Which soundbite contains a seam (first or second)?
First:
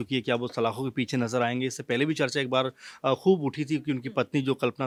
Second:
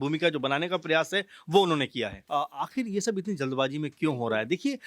second